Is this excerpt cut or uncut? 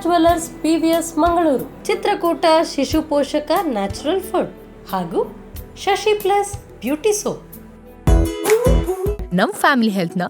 uncut